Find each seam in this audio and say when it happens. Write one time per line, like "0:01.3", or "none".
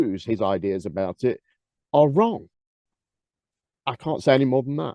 none